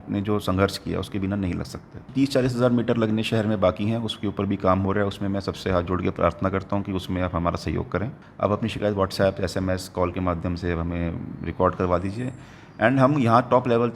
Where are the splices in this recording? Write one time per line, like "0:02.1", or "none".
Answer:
0:02.0
0:08.2